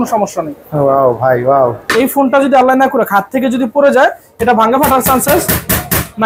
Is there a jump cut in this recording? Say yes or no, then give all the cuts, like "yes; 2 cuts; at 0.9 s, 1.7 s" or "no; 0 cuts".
yes; 1 cut; at 1.8 s